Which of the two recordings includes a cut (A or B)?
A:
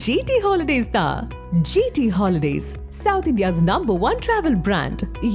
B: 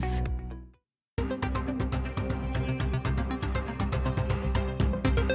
B